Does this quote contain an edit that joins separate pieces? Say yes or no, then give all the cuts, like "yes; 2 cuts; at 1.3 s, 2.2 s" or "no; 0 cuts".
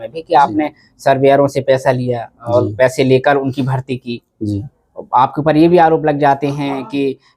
no; 0 cuts